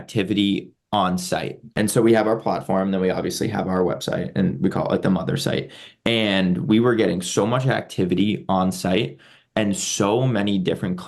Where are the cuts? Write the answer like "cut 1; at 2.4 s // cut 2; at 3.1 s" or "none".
cut 1; at 1.7 s